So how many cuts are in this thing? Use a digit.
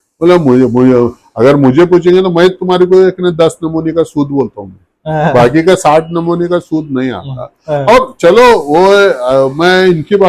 0